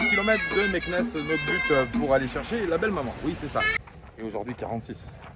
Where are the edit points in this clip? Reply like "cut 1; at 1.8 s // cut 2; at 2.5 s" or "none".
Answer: cut 1; at 3.8 s